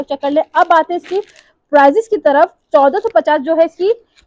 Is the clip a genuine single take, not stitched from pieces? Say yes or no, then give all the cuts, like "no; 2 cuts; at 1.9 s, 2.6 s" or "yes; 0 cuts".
yes; 0 cuts